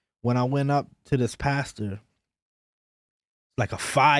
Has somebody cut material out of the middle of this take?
no; 0 cuts

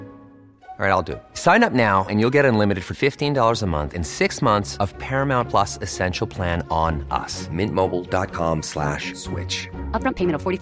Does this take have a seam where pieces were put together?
no; 0 cuts

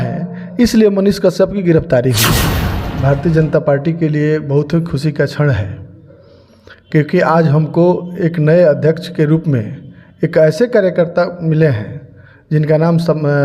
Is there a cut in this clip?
yes; 1 cut; at 2.7 s

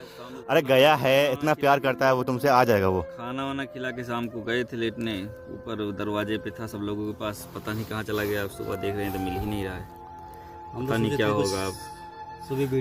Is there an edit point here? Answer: no; 0 cuts

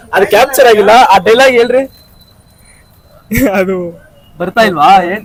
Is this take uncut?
yes; 0 cuts

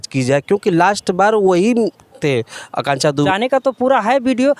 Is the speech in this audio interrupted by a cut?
yes; 1 cut; at 3.3 s

